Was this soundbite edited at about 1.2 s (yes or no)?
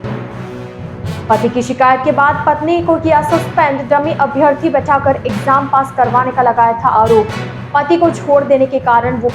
yes